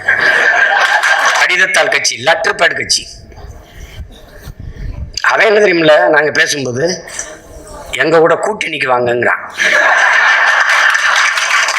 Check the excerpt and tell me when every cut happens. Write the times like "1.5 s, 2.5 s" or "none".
1.4 s